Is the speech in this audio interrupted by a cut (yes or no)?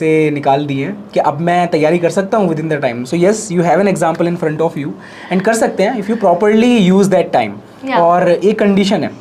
no